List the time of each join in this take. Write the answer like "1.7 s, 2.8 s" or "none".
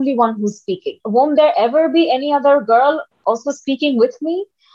0.9 s